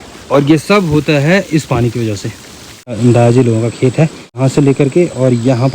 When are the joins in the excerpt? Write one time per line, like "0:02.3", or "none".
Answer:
0:03.0
0:04.4